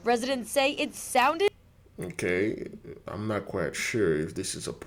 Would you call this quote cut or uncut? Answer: uncut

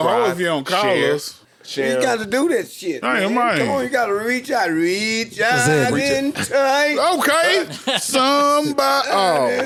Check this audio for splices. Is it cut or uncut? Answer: uncut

